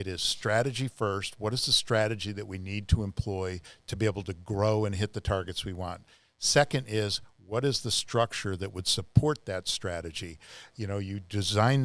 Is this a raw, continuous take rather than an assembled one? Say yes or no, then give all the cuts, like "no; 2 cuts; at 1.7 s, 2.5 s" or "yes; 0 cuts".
yes; 0 cuts